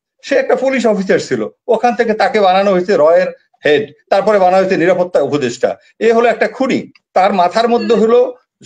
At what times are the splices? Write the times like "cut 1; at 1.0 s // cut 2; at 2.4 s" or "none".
none